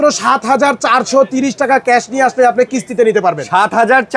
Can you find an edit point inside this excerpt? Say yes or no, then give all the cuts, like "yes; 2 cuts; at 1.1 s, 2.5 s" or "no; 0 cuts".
no; 0 cuts